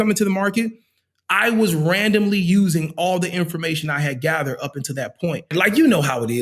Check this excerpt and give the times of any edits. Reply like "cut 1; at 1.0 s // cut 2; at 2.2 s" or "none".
cut 1; at 5.5 s